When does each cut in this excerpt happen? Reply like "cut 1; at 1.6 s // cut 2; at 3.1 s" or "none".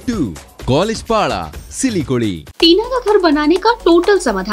cut 1; at 2.5 s